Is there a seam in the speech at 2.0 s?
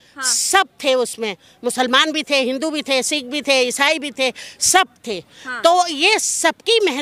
no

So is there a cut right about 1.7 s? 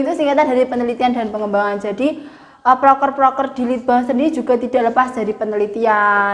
no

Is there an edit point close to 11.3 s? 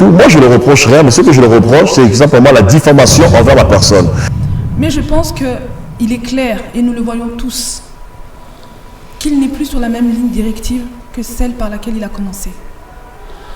no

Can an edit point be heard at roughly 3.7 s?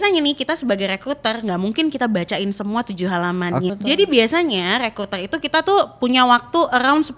yes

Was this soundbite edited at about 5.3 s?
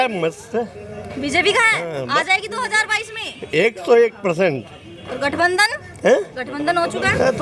no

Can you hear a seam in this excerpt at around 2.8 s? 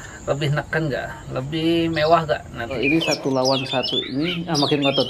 yes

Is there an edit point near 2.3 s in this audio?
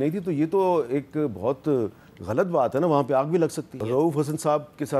no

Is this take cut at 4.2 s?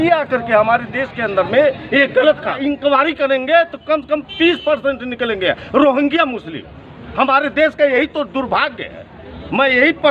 no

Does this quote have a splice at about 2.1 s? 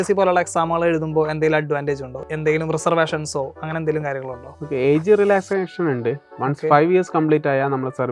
yes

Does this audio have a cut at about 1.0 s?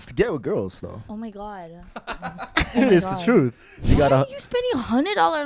yes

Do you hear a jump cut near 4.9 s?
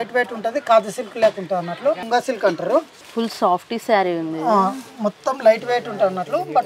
no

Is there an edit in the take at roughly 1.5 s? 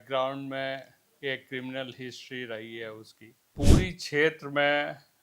no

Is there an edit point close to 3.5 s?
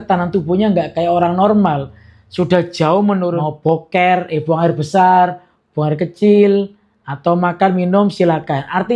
yes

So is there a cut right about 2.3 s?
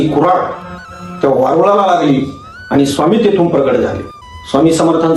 no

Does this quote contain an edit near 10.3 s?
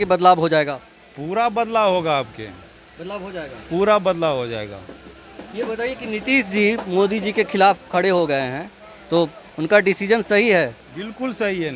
no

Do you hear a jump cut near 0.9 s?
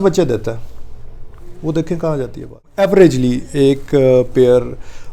no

